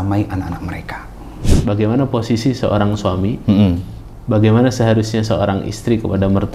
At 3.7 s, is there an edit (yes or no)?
no